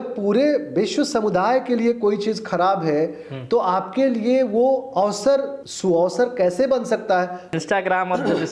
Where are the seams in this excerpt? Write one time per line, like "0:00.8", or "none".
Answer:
0:05.6
0:07.5

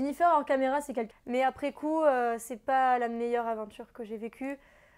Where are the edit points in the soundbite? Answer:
0:01.1

